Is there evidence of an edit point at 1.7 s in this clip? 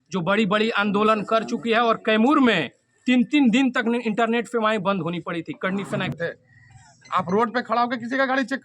no; 1 cut; at 6.1 s

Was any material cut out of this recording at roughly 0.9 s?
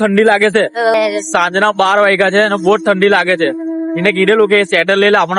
yes; 1 cut; at 0.9 s

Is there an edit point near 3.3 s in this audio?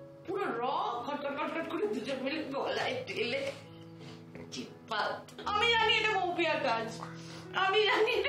no; 1 cut; at 5.3 s

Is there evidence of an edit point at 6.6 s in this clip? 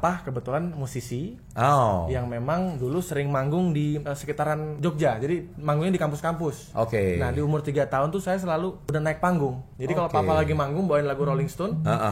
yes; 4 cuts; at 4.5 s, 6.6 s, 8.8 s, 9.7 s

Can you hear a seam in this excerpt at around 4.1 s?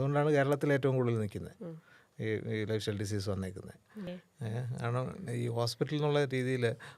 yes; 1 cut; at 4.1 s

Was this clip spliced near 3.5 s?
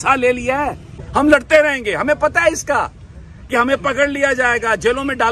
no; 1 cut; at 1.0 s

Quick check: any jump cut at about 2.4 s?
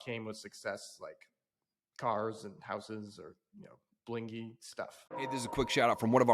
no; 1 cut; at 5.0 s

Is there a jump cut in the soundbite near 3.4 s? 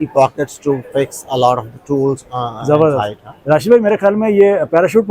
no; 0 cuts

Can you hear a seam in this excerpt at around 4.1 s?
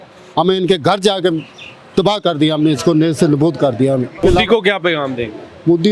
yes; 1 cut; at 4.1 s

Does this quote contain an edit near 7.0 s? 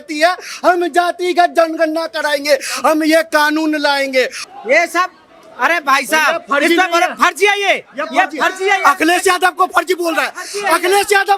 no; 1 cut; at 4.4 s

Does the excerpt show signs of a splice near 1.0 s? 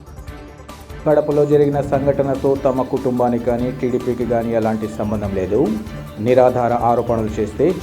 yes; 1 cut; at 1.0 s

